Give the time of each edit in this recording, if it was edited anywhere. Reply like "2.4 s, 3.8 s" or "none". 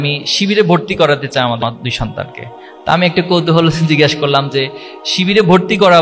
1.6 s